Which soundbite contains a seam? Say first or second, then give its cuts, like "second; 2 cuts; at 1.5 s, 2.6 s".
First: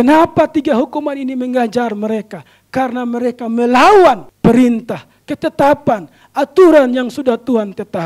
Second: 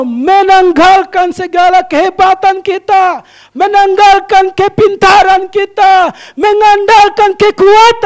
first; 1 cut; at 4.3 s